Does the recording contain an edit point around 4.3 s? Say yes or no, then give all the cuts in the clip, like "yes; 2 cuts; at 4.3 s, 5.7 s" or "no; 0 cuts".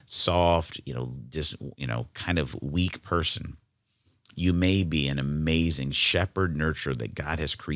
no; 0 cuts